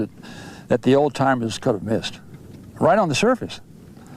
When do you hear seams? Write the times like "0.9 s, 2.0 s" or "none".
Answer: 1.6 s